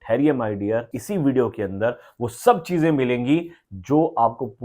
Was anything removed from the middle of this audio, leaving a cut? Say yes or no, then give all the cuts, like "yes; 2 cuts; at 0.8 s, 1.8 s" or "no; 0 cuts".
yes; 1 cut; at 1.0 s